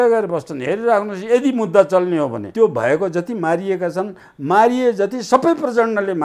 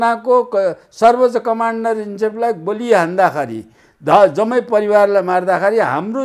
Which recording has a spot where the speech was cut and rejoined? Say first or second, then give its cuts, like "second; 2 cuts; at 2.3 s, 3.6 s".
first; 1 cut; at 2.4 s